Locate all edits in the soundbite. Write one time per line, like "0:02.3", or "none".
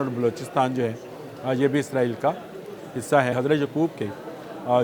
0:03.3